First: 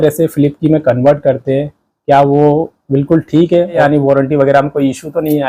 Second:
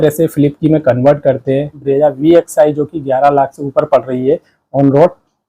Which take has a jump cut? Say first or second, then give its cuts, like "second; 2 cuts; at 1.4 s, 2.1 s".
second; 1 cut; at 1.8 s